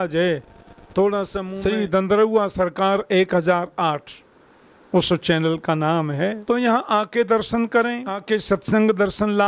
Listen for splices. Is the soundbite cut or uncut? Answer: cut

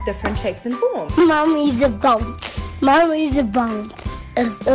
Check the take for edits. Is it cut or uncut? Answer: cut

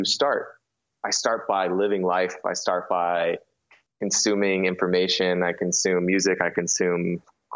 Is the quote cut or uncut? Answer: uncut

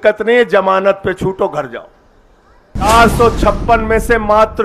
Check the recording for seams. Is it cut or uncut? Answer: cut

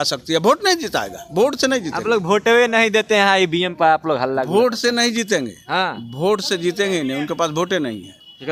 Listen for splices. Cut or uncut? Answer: uncut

